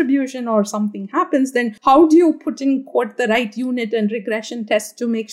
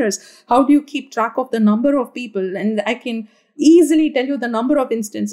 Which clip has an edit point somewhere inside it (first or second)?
first